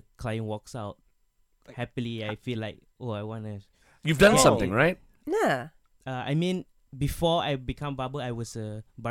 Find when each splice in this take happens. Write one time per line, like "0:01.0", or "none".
none